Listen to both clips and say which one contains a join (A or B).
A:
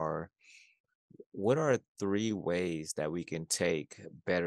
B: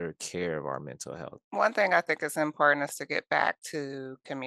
B